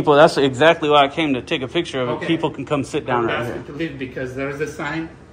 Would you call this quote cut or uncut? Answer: uncut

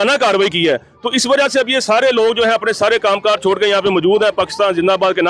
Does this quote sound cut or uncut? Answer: uncut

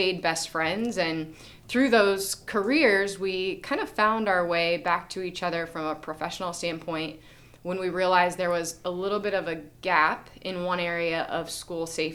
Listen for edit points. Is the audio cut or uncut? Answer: uncut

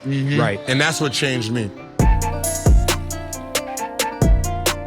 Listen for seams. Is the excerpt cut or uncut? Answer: cut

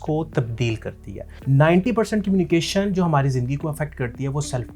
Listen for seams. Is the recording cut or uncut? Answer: cut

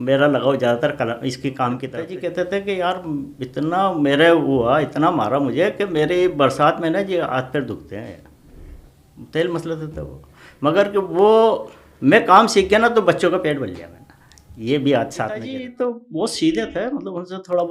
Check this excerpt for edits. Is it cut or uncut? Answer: cut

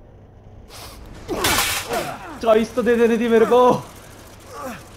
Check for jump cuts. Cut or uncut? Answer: cut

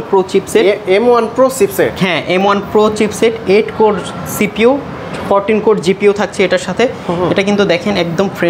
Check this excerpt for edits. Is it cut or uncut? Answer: uncut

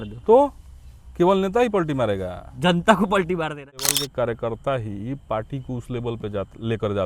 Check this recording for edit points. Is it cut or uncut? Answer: cut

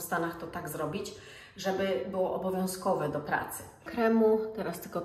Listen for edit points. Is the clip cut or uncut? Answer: cut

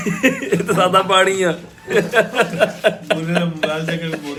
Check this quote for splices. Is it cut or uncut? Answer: uncut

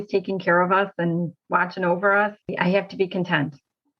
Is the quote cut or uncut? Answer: cut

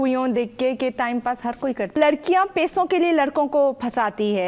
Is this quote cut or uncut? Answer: cut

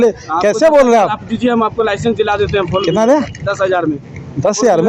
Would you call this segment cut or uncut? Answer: uncut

